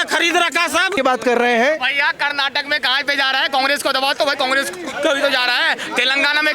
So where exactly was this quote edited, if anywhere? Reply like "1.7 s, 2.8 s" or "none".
0.9 s